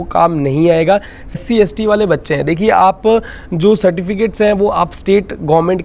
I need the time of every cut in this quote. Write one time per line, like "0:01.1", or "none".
0:01.4